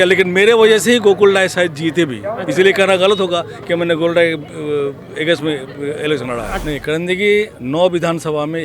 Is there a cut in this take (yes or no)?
yes